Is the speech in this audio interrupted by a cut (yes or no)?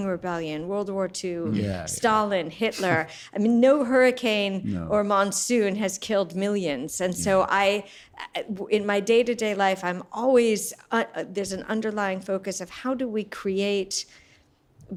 no